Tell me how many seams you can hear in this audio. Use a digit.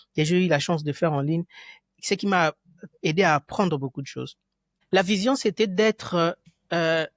1